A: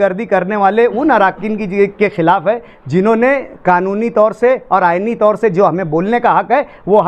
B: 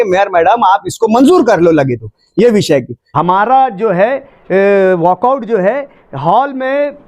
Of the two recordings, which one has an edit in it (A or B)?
B